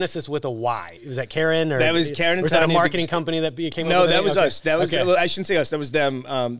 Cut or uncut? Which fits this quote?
cut